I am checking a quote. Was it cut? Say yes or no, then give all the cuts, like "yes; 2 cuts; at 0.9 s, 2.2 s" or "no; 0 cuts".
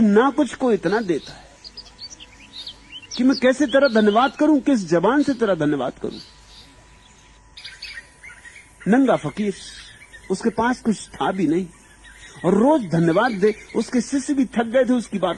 no; 0 cuts